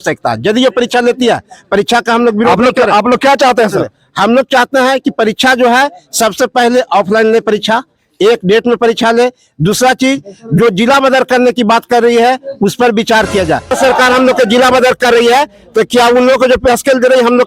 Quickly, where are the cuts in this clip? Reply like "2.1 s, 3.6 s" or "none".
13.7 s